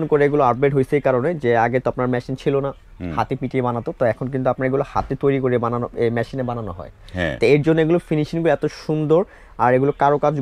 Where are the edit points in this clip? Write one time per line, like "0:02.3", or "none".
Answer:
none